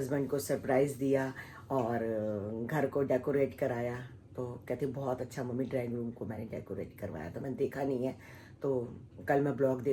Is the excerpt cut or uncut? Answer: uncut